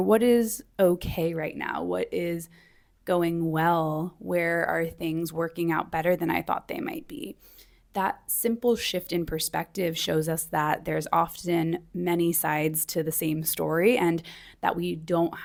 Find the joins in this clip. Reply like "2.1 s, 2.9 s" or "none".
none